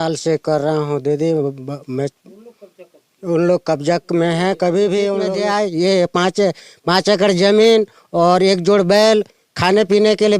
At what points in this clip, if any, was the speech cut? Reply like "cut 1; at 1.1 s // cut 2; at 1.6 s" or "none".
cut 1; at 5.4 s